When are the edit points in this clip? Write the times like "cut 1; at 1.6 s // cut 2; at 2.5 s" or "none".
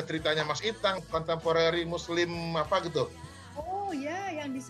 cut 1; at 1.0 s